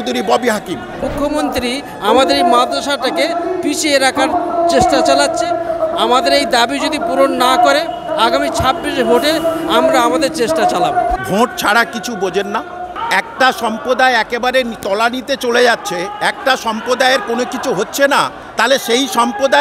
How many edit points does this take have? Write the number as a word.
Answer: four